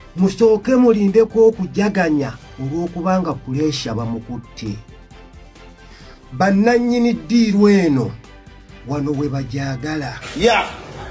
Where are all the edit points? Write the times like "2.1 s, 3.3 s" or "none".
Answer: 10.2 s